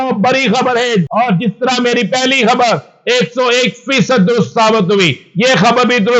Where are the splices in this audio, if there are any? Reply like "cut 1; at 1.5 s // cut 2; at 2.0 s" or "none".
cut 1; at 1.1 s